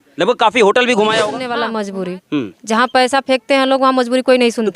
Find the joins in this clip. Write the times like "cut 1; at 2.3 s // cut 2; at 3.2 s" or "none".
cut 1; at 1.5 s